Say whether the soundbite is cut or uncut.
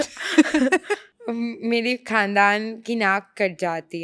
cut